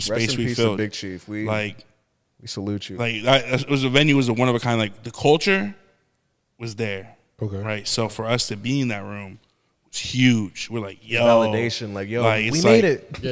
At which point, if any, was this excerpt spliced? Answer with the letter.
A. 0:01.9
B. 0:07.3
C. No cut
C